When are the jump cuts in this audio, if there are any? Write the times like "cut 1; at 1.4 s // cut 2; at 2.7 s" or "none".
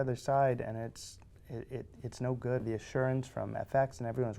cut 1; at 2.6 s